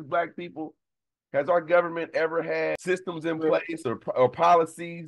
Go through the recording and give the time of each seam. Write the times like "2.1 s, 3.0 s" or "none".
2.8 s